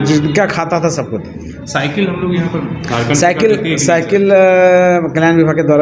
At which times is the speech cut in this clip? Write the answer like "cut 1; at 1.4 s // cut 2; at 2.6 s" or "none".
none

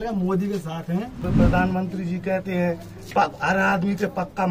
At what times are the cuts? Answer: cut 1; at 1.2 s

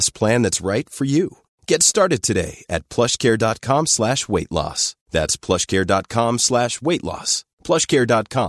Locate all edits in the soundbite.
none

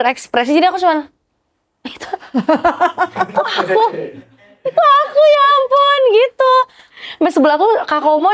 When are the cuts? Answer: cut 1; at 6.8 s

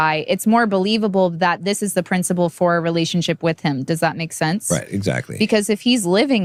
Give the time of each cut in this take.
none

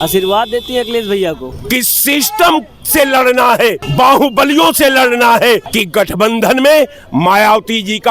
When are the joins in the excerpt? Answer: cut 1; at 1.5 s // cut 2; at 3.8 s // cut 3; at 5.7 s

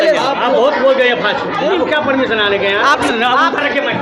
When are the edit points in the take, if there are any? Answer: cut 1; at 1.7 s // cut 2; at 3.0 s

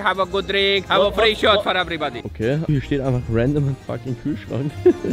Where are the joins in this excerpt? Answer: cut 1; at 0.9 s // cut 2; at 2.7 s

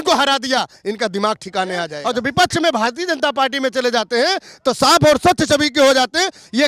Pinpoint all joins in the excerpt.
cut 1; at 2.0 s

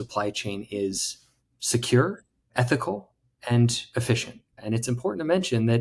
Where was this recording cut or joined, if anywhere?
cut 1; at 4.6 s

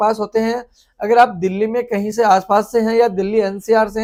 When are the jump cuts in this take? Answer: none

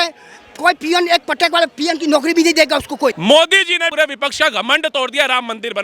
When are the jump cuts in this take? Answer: cut 1; at 3.2 s // cut 2; at 3.9 s

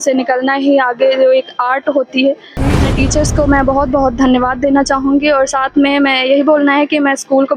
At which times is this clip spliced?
cut 1; at 2.9 s

